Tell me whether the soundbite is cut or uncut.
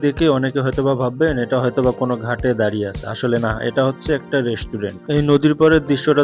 uncut